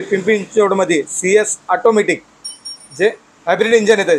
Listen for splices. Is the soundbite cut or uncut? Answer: uncut